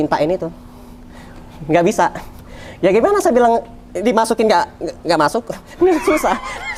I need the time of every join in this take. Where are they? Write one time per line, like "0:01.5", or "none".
none